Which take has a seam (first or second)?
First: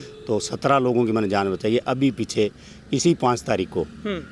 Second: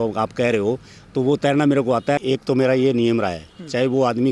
second